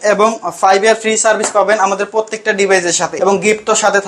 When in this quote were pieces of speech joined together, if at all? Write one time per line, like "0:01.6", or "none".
0:03.2

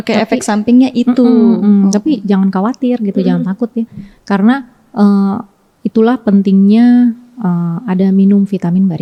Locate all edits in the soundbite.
none

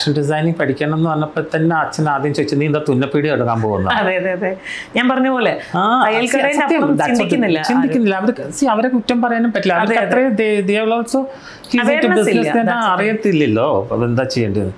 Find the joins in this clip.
none

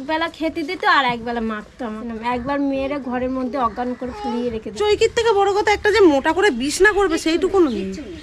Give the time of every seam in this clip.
0:02.1
0:04.8

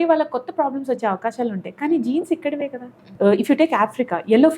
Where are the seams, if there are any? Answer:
0:03.0

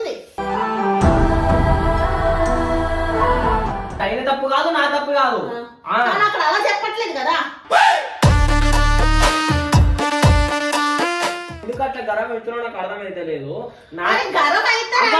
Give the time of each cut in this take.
0:04.0
0:11.6

